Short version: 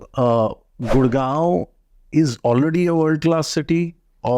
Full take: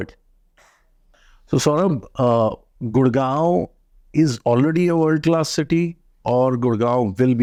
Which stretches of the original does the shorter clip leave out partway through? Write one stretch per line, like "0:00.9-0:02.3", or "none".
none